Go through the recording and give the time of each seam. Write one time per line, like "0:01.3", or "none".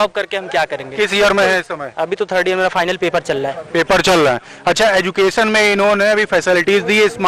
none